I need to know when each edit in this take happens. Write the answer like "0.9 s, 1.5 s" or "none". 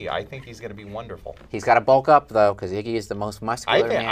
none